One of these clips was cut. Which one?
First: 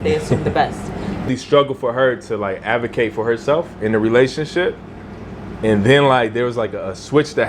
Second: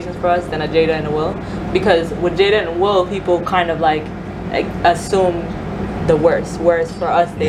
first; 1 cut; at 1.3 s

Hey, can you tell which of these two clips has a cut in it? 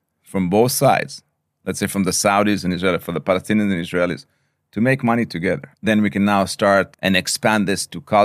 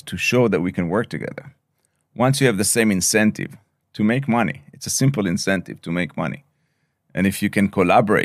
first; 2 cuts; at 5.7 s, 6.9 s

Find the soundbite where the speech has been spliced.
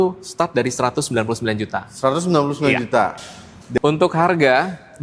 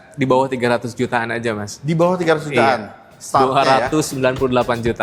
first; 1 cut; at 3.8 s

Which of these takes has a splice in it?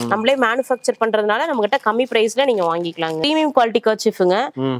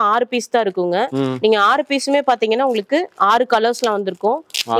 first; 1 cut; at 3.3 s

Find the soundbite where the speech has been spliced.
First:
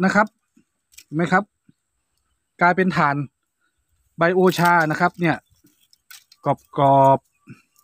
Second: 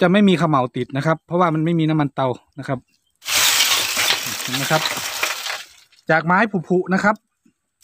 second; 1 cut; at 3.1 s

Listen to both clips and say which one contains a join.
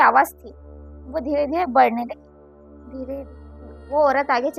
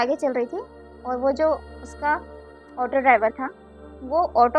first; 1 cut; at 3.3 s

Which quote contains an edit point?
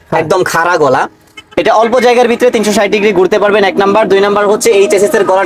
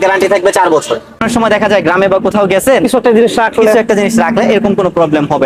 second; 1 cut; at 1.2 s

